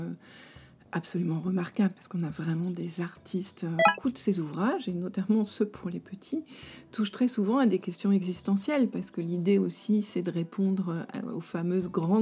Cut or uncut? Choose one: cut